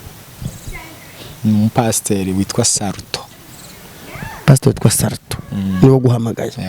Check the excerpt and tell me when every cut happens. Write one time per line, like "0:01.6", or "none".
none